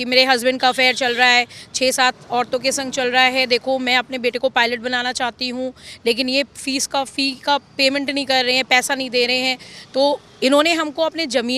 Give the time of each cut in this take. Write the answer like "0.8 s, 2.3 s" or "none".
none